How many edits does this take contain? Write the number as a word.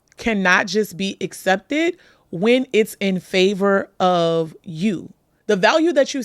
one